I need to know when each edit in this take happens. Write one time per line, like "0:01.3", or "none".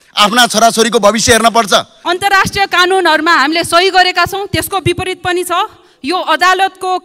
0:01.9